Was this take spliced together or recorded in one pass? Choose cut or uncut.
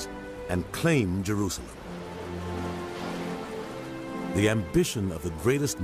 uncut